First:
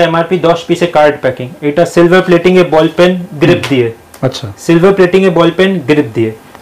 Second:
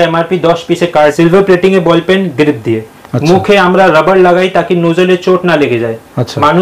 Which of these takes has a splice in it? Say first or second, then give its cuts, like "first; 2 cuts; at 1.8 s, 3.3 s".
second; 1 cut; at 1.1 s